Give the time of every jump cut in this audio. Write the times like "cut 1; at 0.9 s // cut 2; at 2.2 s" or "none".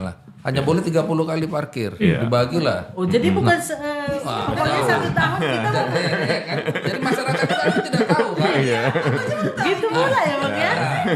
none